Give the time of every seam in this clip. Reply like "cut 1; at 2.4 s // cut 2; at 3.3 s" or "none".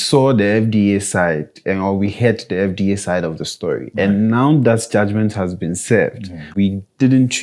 cut 1; at 6.5 s